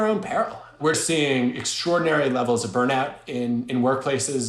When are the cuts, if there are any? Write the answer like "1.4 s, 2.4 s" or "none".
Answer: 1.0 s